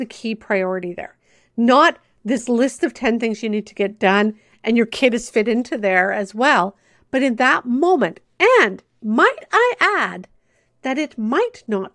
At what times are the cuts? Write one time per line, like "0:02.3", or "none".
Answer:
none